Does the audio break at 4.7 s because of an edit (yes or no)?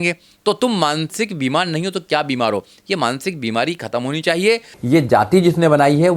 yes